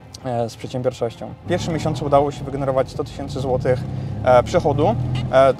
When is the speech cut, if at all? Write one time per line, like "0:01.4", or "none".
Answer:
0:01.4